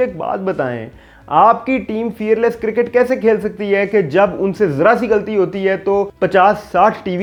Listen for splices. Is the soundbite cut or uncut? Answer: uncut